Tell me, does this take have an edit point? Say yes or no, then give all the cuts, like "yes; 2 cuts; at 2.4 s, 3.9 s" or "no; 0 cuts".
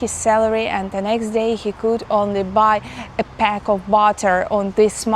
no; 0 cuts